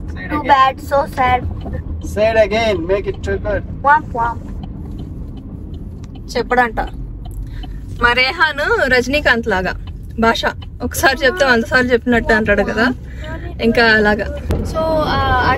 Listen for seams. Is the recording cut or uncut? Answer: uncut